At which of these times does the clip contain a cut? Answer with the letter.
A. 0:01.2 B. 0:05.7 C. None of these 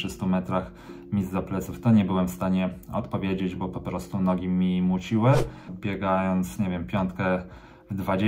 B